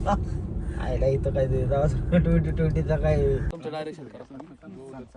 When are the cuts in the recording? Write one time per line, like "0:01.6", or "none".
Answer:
0:03.5